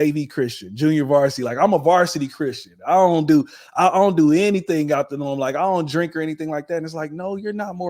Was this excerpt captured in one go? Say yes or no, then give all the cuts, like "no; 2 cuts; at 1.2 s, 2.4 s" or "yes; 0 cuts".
yes; 0 cuts